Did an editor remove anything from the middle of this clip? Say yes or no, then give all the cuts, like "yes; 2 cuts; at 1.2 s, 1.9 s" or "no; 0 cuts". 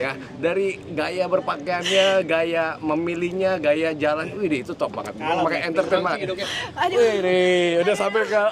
no; 0 cuts